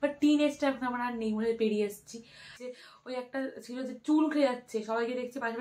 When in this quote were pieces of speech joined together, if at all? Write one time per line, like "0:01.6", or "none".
0:02.6

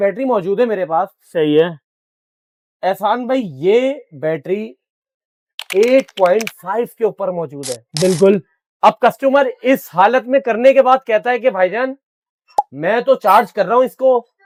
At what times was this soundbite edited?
none

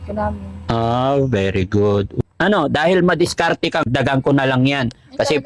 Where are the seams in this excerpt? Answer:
0:02.2
0:03.8

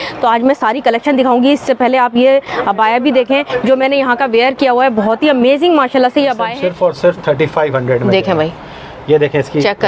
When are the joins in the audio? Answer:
0:06.5

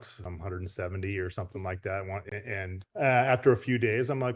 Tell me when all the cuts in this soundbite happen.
0:02.2

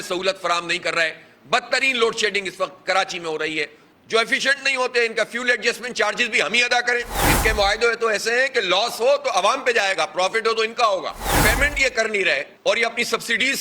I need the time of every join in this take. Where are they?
0:04.1
0:11.3

